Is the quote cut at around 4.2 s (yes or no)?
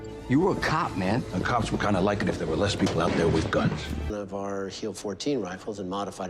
yes